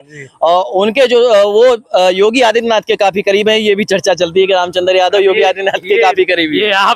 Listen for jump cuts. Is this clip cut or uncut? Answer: uncut